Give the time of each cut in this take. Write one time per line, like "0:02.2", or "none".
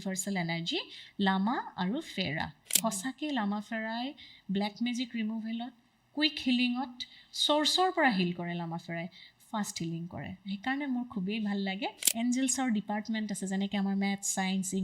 0:02.8
0:12.0

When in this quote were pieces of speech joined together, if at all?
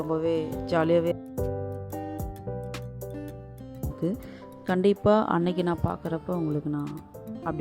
0:01.1
0:04.0

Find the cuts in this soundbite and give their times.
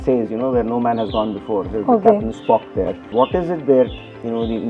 0:03.1

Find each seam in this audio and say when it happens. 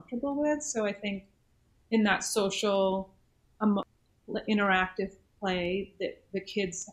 0:03.9

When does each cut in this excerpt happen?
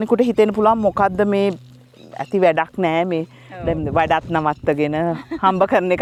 none

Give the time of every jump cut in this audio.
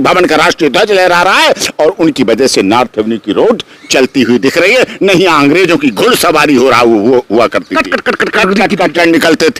none

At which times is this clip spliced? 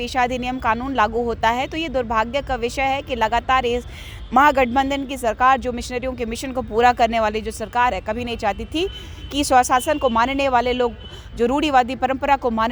none

